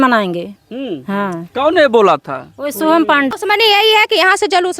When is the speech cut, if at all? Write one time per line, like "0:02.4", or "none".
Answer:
0:03.3